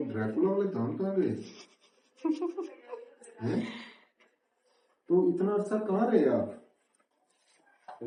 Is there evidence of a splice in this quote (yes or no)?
no